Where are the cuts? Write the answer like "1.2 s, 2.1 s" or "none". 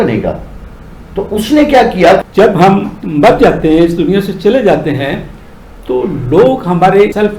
2.2 s

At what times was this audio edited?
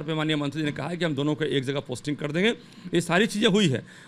none

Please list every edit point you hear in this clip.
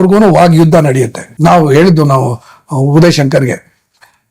1.2 s

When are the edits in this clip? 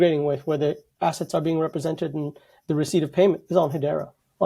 none

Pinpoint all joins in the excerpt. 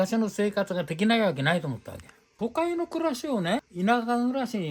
2.3 s, 3.7 s

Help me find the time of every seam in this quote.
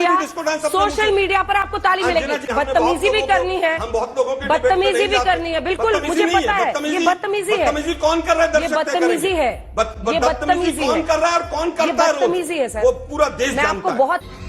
2.5 s

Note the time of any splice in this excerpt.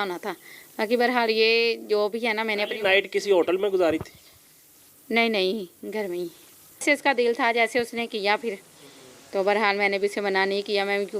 6.8 s

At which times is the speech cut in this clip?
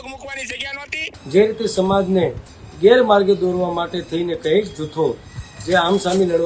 1.2 s

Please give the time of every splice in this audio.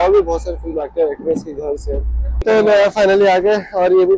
2.3 s

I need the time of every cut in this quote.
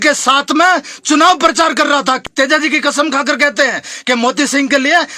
1.9 s

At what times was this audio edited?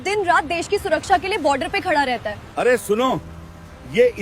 2.4 s

